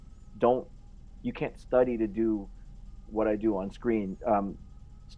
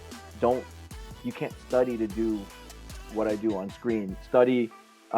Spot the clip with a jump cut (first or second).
second